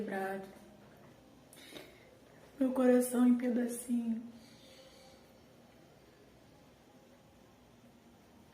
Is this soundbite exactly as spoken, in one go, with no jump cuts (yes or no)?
no